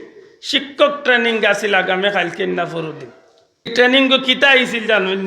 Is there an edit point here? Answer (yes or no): yes